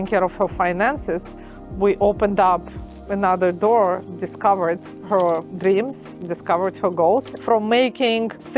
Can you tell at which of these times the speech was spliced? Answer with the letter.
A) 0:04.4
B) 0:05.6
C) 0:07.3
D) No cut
C